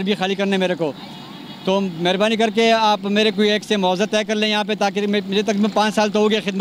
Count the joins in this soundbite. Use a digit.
0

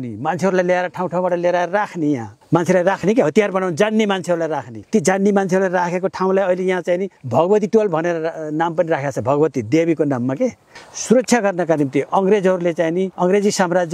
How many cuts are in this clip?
5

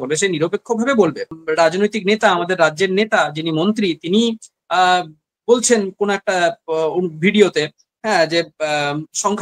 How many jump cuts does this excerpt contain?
1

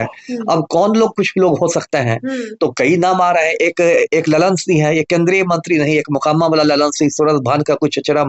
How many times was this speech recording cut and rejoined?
0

